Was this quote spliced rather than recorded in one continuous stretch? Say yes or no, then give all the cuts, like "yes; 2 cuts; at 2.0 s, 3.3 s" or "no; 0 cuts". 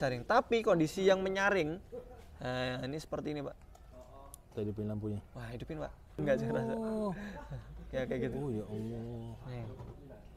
yes; 1 cut; at 6.0 s